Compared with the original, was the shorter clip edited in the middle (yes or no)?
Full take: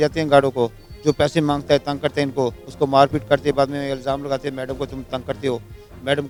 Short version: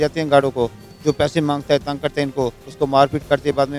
no